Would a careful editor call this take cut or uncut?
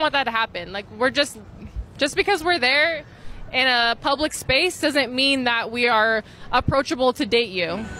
uncut